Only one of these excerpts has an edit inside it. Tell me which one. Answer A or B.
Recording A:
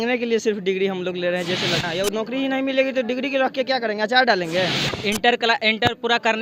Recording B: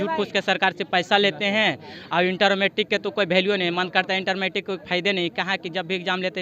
A